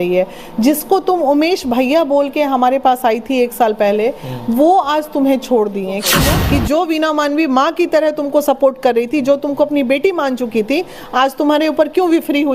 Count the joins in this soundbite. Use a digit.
1